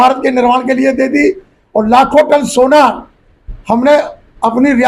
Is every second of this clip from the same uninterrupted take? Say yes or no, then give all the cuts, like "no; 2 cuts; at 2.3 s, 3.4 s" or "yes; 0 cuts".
yes; 0 cuts